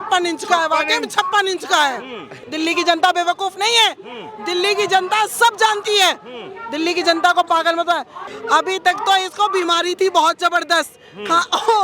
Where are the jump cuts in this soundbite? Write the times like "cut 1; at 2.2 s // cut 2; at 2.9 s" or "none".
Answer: cut 1; at 2.4 s // cut 2; at 8.3 s